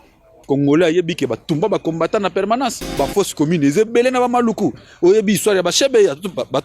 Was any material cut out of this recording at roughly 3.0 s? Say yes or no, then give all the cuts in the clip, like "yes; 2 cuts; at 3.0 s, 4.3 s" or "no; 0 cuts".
yes; 1 cut; at 3.0 s